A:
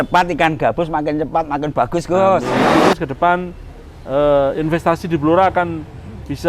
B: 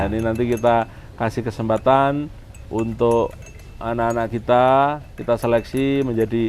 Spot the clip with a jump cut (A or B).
A